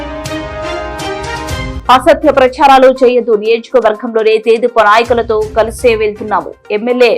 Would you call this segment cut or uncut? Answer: uncut